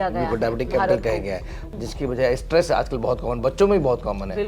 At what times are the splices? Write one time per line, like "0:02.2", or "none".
0:01.6